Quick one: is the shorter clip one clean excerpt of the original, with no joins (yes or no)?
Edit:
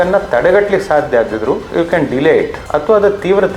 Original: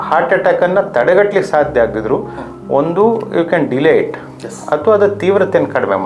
no